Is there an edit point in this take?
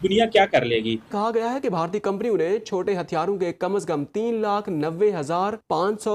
yes; 1 cut; at 1.1 s

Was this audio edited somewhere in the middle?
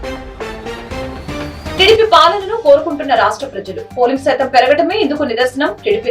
yes; 1 cut; at 1.8 s

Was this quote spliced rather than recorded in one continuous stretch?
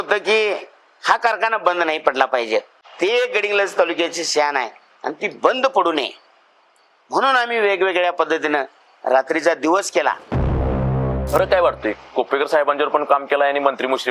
yes; 2 cuts; at 2.8 s, 10.7 s

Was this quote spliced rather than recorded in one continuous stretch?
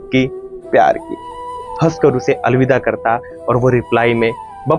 yes; 1 cut; at 1.7 s

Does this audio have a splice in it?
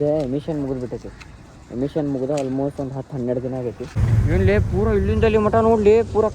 yes; 1 cut; at 4.0 s

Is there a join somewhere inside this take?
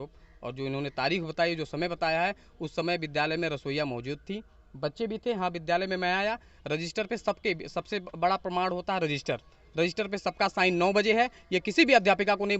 no; 0 cuts

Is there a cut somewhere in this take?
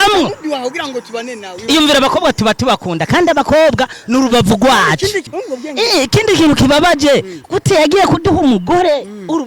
yes; 1 cut; at 5.3 s

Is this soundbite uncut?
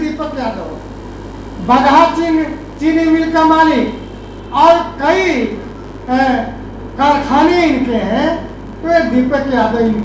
yes; 0 cuts

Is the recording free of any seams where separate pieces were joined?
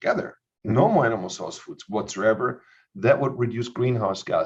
yes; 0 cuts

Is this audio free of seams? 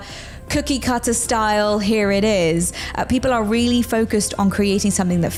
yes; 0 cuts

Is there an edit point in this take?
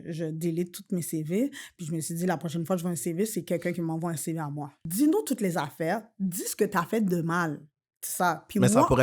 yes; 1 cut; at 4.7 s

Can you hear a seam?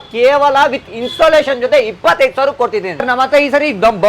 yes; 1 cut; at 3.0 s

